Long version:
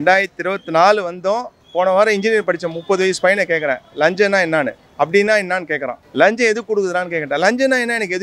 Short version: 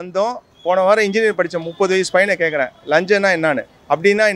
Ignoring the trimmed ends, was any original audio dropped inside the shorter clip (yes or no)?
no